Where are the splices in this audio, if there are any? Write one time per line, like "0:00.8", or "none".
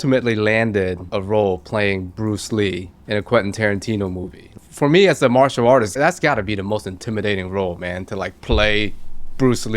0:01.0
0:02.9
0:04.5
0:05.9